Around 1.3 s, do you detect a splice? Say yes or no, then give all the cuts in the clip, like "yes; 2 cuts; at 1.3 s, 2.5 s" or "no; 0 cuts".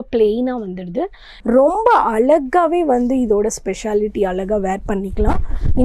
yes; 1 cut; at 1.3 s